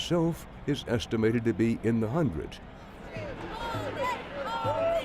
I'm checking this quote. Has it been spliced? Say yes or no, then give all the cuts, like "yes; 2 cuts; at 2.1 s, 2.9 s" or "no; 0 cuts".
yes; 1 cut; at 3.7 s